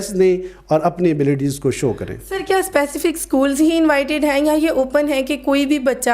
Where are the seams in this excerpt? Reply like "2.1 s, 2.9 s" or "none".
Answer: none